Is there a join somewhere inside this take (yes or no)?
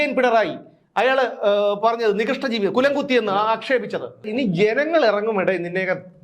yes